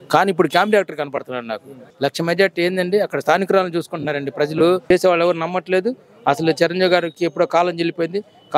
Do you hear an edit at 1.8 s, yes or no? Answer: yes